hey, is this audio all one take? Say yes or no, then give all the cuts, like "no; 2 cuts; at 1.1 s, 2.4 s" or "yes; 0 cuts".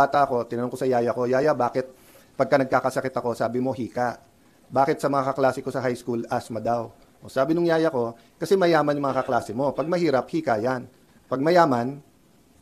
yes; 0 cuts